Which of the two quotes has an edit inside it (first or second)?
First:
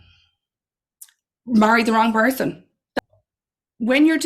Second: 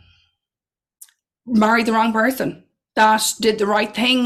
first